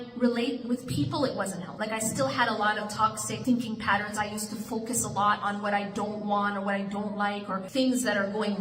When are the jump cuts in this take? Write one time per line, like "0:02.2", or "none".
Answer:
0:01.7
0:03.3
0:07.6